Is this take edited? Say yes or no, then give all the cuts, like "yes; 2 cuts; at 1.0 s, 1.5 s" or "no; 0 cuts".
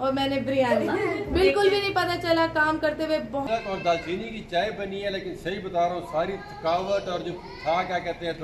yes; 1 cut; at 3.4 s